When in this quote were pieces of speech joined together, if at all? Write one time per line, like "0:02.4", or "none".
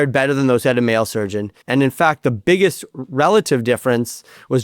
0:01.5

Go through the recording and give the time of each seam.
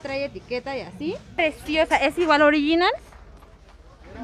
0:01.4

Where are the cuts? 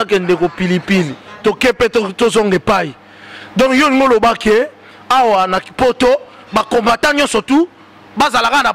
0:01.2

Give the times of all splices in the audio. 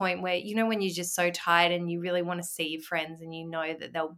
none

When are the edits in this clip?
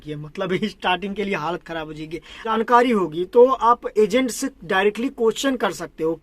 0:02.5

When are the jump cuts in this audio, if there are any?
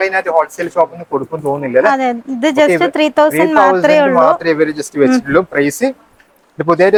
none

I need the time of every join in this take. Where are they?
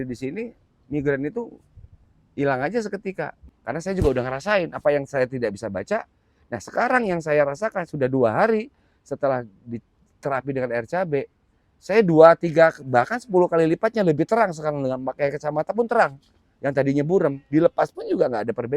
0:03.4

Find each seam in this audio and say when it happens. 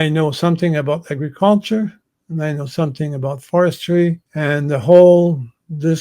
0:04.3

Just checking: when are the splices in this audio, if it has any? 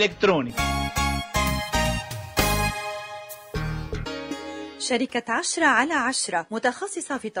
0:03.4
0:04.7

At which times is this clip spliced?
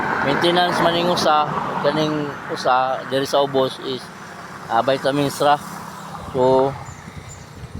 none

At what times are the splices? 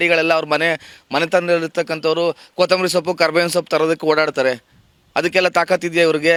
none

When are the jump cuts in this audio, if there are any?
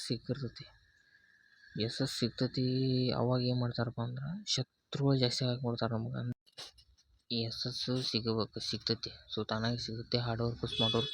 0:06.3

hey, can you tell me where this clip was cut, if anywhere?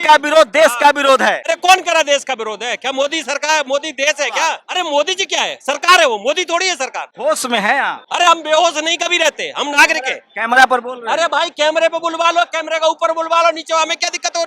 0:01.4
0:04.6
0:08.0

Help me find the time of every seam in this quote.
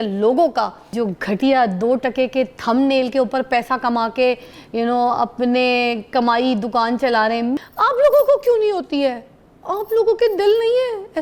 0:00.9
0:07.6

